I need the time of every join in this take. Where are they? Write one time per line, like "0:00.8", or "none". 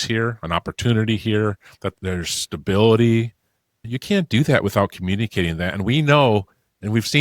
0:01.9